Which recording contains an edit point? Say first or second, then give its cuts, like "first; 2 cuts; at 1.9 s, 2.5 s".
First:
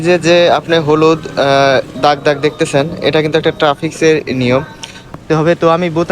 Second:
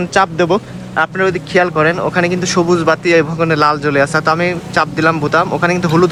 first; 1 cut; at 5.1 s